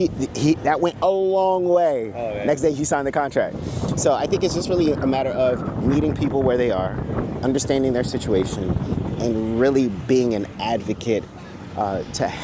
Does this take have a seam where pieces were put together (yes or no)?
no